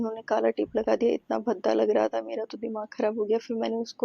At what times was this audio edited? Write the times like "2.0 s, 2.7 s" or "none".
none